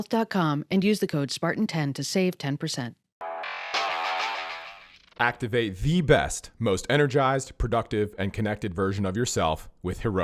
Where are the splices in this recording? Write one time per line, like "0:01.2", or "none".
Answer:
0:03.1
0:04.4